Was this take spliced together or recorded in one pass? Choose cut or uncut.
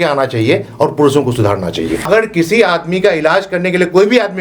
cut